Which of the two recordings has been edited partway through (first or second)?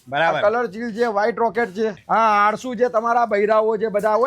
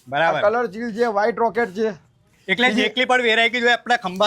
first